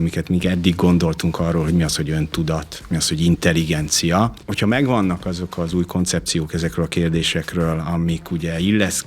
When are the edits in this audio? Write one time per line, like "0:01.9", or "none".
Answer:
0:04.4